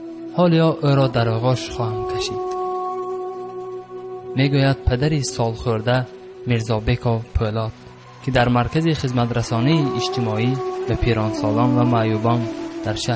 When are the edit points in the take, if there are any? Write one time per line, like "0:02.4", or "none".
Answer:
none